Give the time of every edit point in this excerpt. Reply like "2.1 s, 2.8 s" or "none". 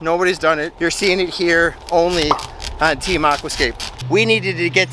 4.0 s